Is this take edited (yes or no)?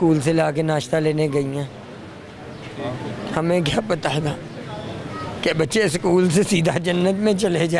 no